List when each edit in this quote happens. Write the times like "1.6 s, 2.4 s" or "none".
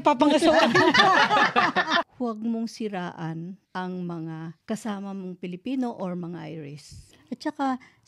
2.1 s, 7.1 s